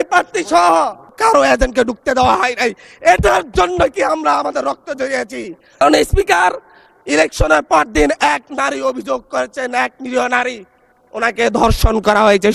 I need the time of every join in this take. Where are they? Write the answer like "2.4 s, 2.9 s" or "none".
1.1 s, 5.8 s